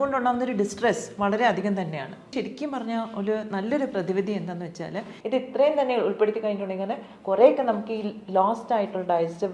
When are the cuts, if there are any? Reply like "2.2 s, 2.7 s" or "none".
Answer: 2.3 s, 5.1 s